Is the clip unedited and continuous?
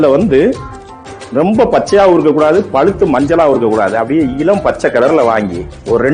yes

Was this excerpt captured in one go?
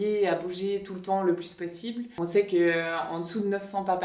no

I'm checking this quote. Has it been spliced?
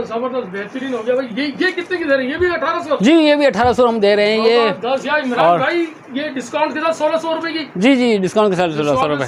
no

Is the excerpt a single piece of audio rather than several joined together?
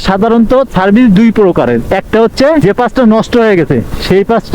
no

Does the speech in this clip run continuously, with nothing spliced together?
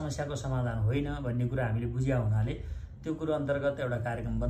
yes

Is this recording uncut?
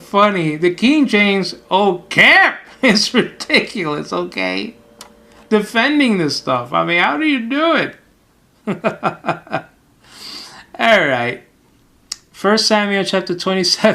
no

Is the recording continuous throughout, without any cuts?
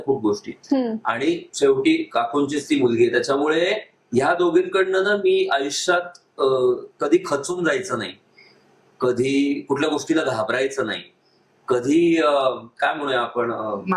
yes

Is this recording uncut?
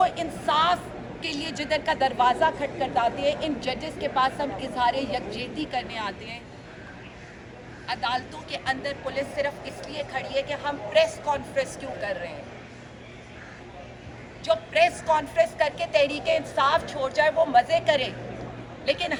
yes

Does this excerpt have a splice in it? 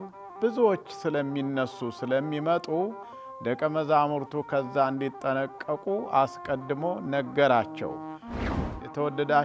yes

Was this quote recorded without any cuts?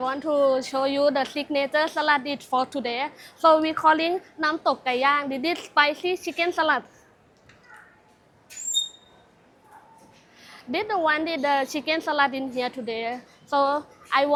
yes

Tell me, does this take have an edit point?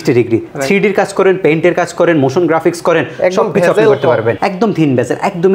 no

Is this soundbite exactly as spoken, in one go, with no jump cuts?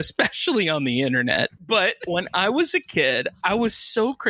no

